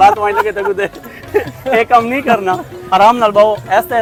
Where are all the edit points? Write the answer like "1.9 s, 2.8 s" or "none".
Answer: none

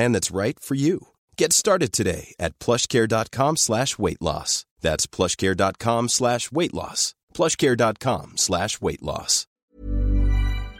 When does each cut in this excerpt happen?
9.4 s

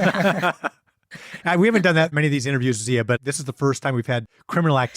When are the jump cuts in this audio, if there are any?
2.1 s, 3.2 s

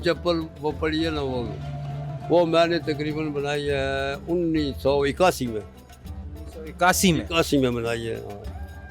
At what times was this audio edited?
none

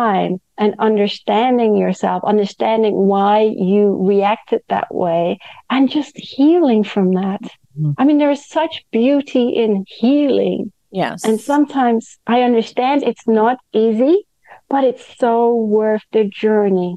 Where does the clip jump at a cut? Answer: none

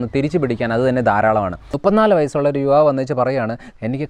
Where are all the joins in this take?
1.6 s

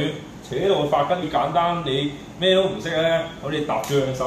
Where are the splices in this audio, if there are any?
1.2 s

